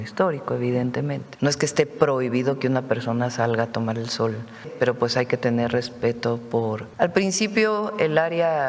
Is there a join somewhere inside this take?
yes; 3 cuts; at 1.2 s, 4.7 s, 6.8 s

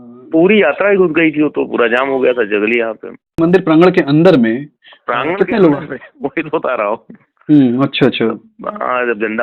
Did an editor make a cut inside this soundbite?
yes; 1 cut; at 3.4 s

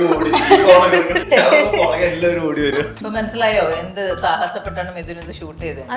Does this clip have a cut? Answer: yes; 2 cuts; at 1.2 s, 3.0 s

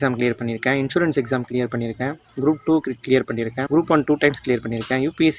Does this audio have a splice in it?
yes; 1 cut; at 3.6 s

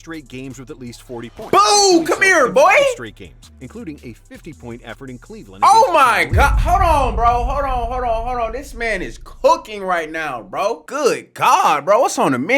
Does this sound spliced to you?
no; 0 cuts

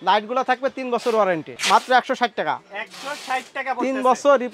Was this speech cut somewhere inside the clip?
yes; 1 cut; at 1.6 s

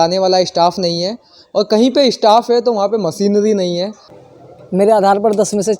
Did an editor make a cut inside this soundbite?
yes; 1 cut; at 3.7 s

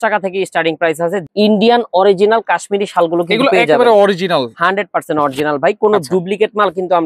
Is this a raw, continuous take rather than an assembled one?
no; 1 cut; at 1.2 s

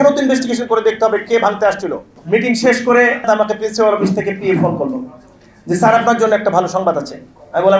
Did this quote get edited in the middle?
yes; 2 cuts; at 2.1 s, 3.2 s

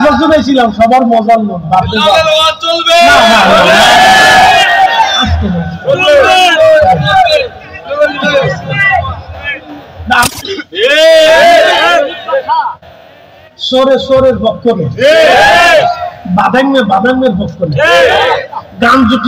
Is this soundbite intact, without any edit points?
no; 1 cut; at 10.2 s

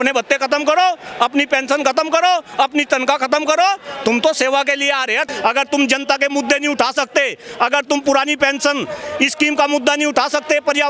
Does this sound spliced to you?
yes; 1 cut; at 5.3 s

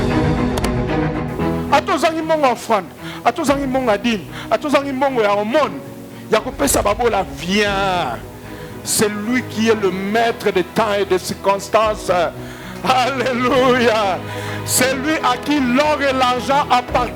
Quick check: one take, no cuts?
no; 1 cut; at 1.2 s

